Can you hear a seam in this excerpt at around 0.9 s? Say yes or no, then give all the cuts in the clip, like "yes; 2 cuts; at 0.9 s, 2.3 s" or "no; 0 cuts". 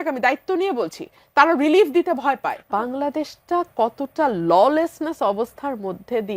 no; 1 cut; at 2.6 s